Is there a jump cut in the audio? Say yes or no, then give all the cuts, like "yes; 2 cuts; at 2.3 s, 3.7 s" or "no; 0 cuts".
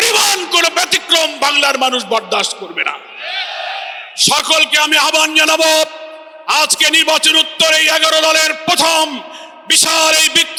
no; 0 cuts